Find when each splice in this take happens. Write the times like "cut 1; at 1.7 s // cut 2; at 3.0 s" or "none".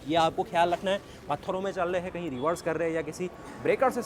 none